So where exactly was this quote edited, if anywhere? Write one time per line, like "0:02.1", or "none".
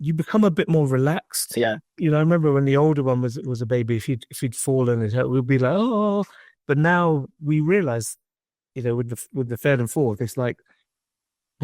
0:01.9

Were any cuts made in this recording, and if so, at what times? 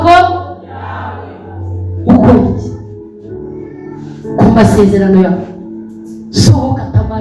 none

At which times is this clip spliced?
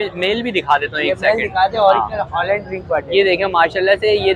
none

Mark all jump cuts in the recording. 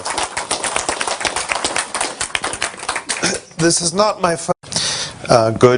none

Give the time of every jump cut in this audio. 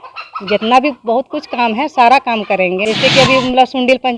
0:02.8

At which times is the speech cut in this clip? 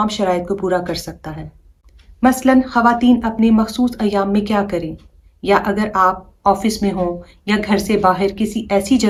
none

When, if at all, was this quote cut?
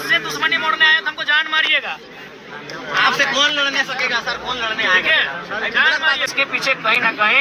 0:06.3

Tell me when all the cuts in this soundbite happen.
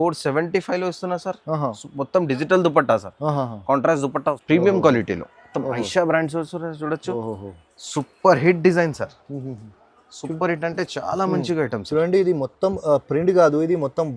0:04.4

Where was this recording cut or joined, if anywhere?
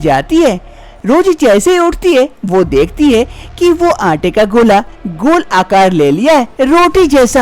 none

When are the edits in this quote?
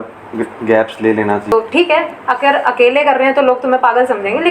0:01.5

